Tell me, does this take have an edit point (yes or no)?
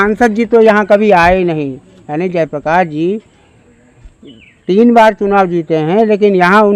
no